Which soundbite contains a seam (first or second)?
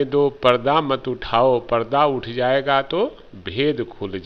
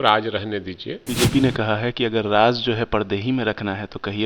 second